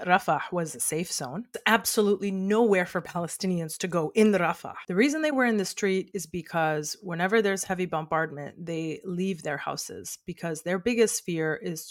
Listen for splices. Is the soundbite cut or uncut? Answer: cut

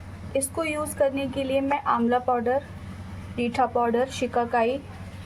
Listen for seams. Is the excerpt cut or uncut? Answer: uncut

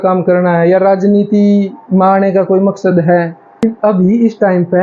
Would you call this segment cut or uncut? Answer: cut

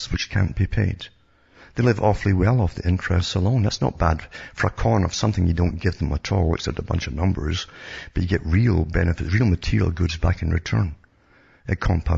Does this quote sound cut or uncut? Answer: uncut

